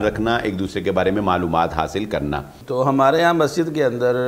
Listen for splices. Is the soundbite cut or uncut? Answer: cut